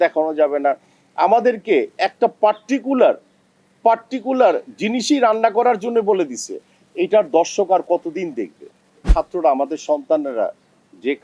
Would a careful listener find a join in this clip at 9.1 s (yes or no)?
yes